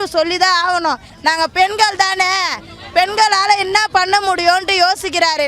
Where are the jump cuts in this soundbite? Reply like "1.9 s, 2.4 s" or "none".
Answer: 1.1 s